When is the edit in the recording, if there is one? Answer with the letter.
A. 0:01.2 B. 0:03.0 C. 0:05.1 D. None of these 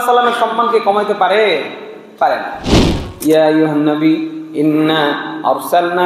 B